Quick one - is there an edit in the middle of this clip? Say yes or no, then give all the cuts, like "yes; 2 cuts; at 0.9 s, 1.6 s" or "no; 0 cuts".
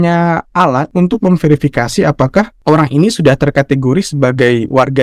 yes; 2 cuts; at 0.9 s, 2.5 s